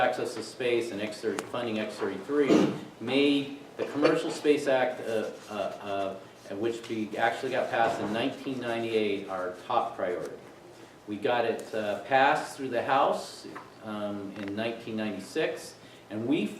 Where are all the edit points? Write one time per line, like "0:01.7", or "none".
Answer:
0:01.6